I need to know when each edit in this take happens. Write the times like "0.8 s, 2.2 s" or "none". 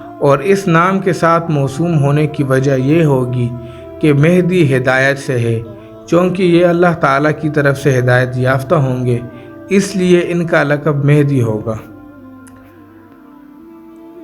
11.8 s